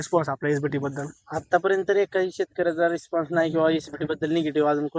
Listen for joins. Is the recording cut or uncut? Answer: uncut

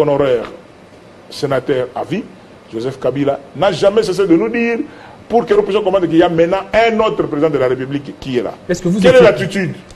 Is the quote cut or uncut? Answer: uncut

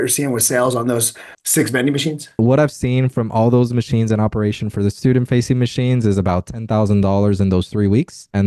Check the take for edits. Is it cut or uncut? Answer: uncut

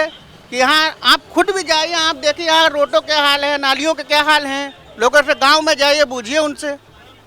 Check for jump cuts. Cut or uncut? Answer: uncut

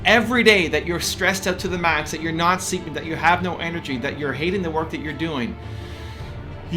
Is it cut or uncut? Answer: uncut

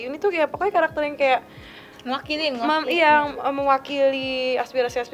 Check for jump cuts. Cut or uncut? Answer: uncut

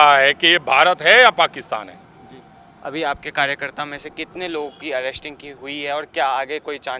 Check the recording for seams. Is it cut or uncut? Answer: uncut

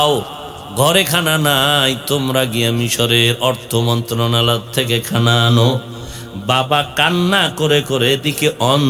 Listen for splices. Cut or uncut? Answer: uncut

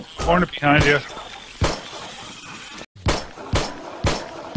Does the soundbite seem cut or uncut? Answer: cut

